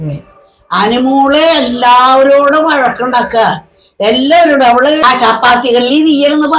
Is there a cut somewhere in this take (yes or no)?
yes